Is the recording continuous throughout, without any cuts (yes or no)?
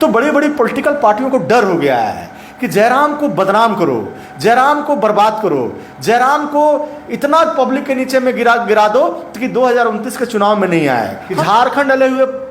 no